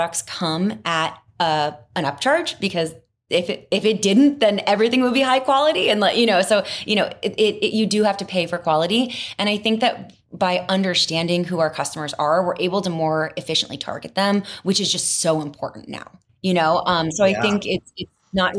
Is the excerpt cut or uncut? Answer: uncut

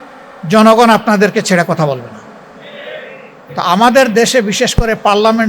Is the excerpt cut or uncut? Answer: cut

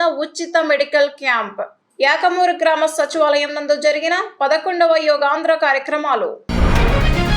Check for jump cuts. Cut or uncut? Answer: cut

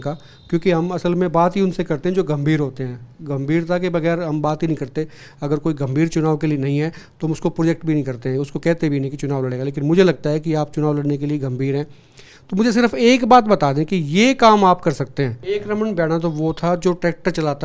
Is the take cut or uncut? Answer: cut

